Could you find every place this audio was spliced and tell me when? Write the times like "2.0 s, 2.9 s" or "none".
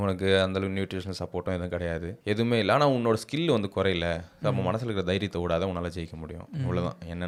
none

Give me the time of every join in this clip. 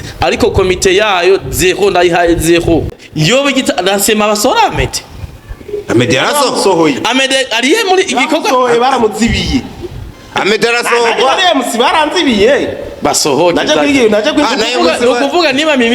3.0 s

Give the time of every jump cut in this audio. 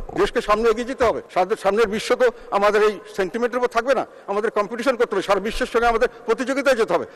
1.2 s

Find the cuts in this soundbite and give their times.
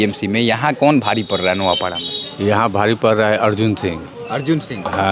none

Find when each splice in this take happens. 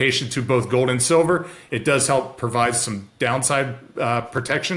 none

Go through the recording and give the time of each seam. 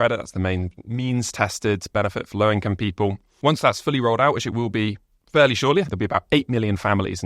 3.3 s, 5.9 s

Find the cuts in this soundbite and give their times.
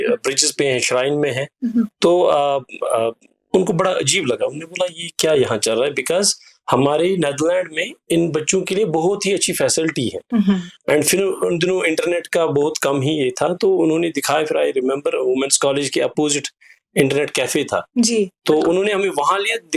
none

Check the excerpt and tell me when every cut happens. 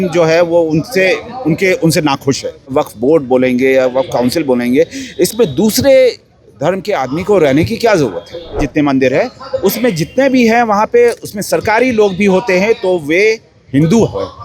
2.7 s, 8.6 s

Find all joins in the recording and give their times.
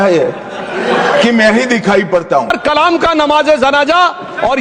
2.5 s

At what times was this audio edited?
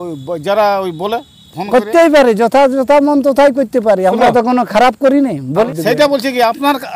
5.7 s

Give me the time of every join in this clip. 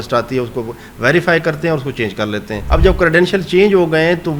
2.5 s

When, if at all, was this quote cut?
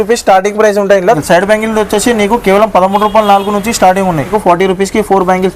1.2 s, 4.3 s

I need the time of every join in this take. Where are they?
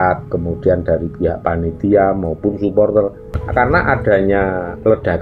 3.4 s

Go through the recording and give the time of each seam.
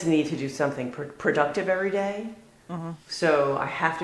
none

